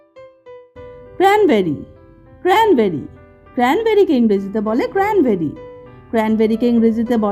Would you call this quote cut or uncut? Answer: uncut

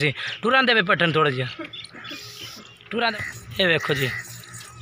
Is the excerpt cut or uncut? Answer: cut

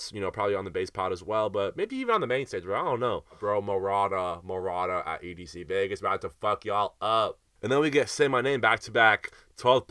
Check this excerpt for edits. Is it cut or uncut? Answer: cut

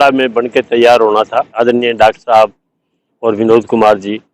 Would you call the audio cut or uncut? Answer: cut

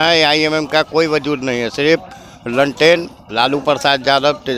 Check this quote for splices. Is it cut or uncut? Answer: uncut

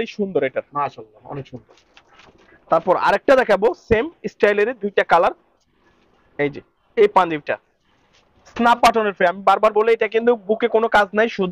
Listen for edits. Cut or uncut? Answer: uncut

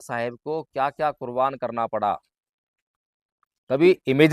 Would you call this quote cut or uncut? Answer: uncut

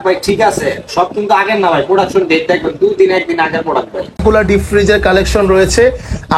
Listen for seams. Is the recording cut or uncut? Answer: cut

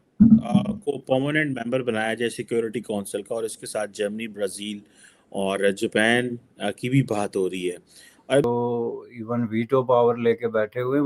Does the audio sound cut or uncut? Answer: cut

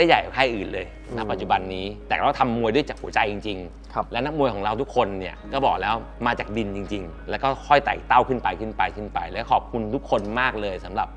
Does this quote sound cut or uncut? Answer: uncut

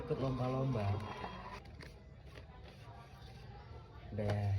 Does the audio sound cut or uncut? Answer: cut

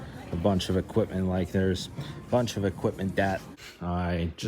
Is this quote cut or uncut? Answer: cut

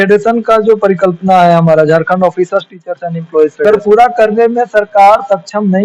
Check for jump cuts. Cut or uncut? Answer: cut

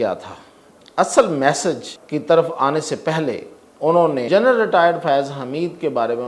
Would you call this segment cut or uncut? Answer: cut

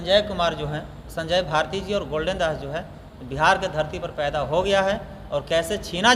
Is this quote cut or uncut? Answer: uncut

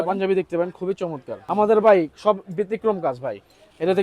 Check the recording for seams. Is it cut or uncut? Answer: cut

